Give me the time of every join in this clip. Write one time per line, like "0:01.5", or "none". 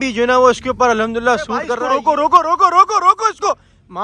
0:01.7